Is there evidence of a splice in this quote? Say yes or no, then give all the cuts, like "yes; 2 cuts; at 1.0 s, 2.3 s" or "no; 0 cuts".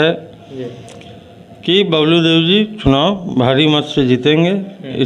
no; 0 cuts